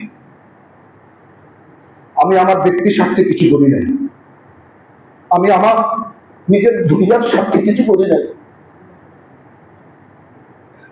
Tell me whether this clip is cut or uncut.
uncut